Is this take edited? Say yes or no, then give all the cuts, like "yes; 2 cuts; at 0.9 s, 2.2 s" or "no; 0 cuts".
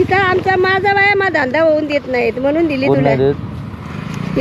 no; 0 cuts